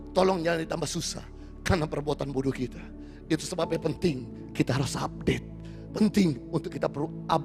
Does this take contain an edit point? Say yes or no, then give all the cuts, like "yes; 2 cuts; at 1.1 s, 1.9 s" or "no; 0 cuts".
no; 0 cuts